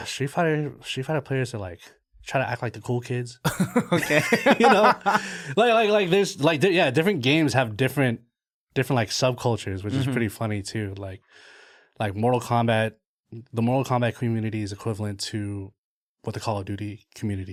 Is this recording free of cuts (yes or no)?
yes